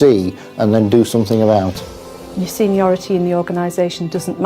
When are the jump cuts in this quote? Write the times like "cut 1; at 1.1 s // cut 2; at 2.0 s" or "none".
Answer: cut 1; at 2.1 s